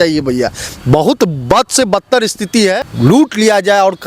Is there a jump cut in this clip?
yes; 1 cut; at 2.8 s

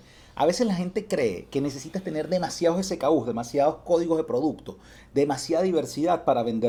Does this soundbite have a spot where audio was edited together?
no; 0 cuts

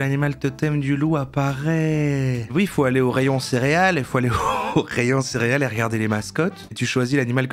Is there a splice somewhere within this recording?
yes; 1 cut; at 2.4 s

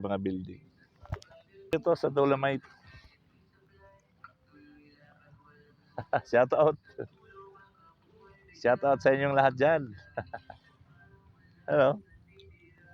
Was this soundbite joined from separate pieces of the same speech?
yes; 1 cut; at 1.7 s

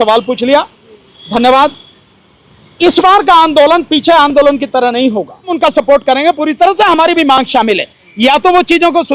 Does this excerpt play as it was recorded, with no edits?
no; 1 cut; at 5.5 s

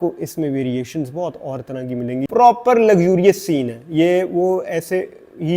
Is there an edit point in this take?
yes; 1 cut; at 2.3 s

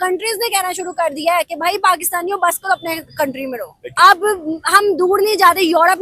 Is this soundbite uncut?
no; 1 cut; at 3.8 s

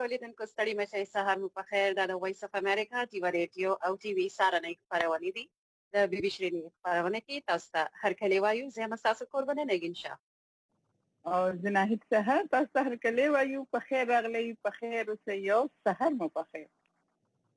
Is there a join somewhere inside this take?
yes; 1 cut; at 1.3 s

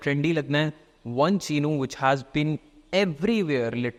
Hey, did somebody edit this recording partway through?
no; 0 cuts

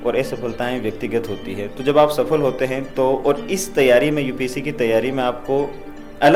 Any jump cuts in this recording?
no; 0 cuts

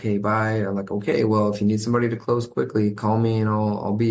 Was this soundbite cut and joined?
no; 0 cuts

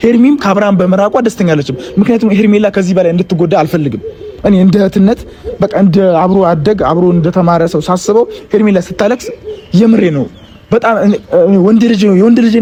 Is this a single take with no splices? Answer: yes; 0 cuts

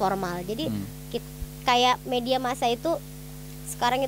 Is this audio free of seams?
no; 1 cut; at 1.2 s

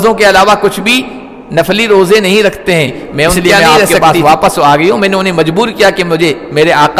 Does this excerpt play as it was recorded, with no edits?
yes; 0 cuts

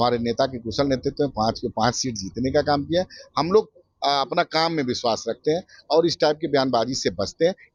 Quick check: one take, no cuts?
yes; 0 cuts

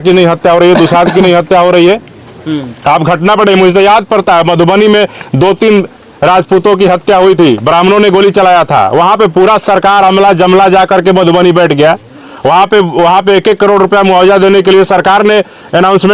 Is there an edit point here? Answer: no; 0 cuts

